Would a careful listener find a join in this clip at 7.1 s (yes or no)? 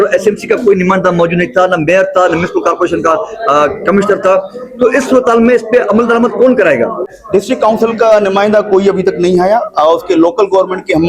yes